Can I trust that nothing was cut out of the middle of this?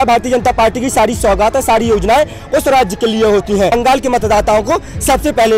no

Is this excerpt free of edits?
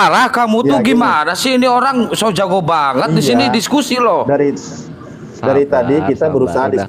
yes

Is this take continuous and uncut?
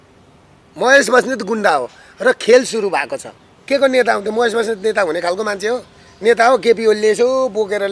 no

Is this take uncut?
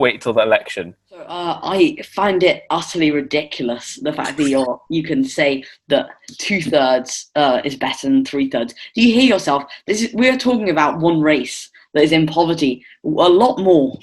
no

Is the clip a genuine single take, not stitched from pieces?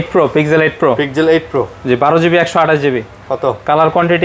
yes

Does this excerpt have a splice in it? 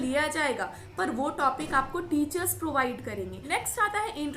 yes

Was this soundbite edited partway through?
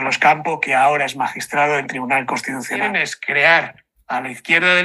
yes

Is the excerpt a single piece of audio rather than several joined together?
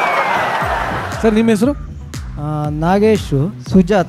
no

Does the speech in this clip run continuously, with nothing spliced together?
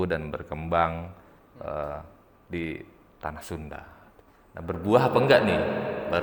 yes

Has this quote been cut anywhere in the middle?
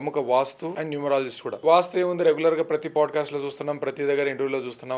yes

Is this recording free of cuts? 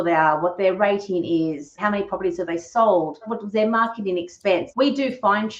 no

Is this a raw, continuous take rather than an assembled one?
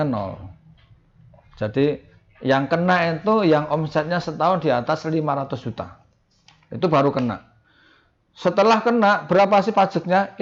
yes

